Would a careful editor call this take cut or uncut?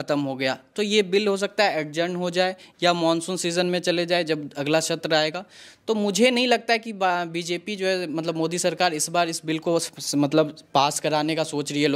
uncut